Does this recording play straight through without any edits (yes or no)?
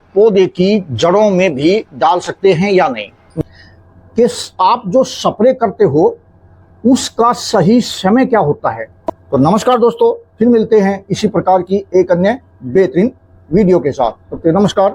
no